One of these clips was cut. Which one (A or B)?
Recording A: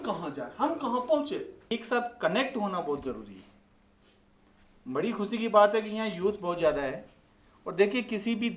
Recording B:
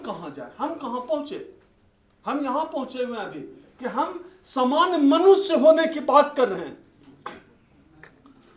A